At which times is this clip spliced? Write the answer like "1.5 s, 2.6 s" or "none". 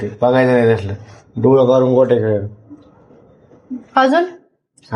none